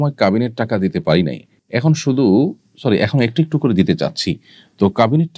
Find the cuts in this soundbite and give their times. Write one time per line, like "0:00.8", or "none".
none